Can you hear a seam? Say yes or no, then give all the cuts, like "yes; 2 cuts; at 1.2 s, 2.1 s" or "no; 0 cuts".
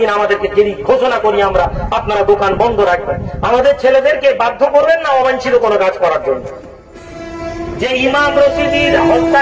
yes; 1 cut; at 7.3 s